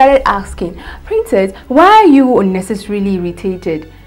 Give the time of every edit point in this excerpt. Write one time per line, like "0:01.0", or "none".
none